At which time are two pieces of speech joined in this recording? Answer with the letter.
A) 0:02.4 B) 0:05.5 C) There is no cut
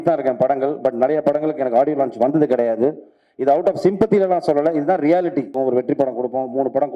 B